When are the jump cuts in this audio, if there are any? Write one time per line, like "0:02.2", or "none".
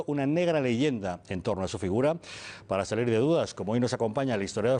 none